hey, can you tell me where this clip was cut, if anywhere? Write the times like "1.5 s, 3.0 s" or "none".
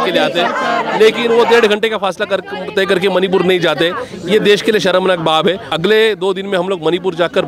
5.7 s